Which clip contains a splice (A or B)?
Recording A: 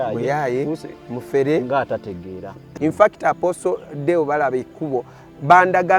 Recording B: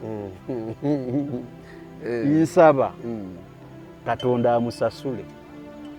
A